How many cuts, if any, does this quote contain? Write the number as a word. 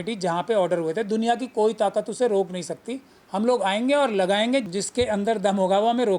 one